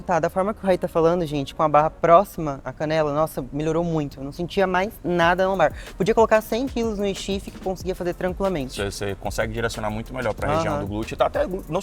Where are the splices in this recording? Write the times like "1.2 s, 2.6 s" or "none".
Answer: none

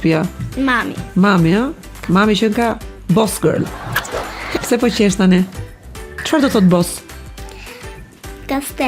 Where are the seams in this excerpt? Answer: 6.2 s

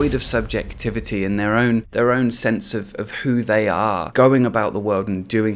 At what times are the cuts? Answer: 1.9 s, 4.1 s

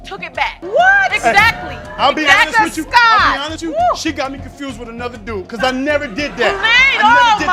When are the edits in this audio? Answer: none

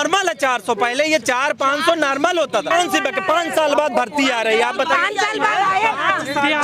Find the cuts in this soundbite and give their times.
2.7 s

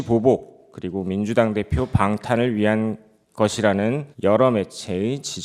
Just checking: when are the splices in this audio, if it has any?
none

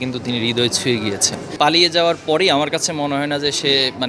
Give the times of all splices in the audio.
1.5 s

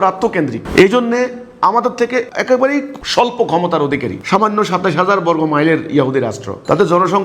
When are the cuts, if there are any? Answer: none

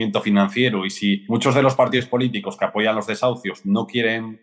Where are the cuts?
1.2 s

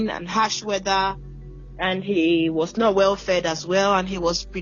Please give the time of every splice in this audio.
none

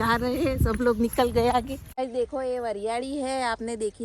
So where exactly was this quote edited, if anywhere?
1.8 s

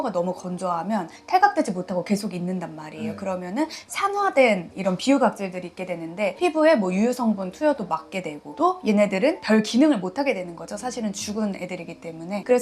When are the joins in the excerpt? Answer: none

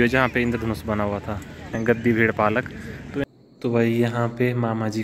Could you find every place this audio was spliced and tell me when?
1.8 s, 3.2 s

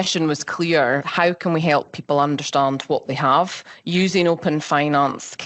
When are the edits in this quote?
1.1 s

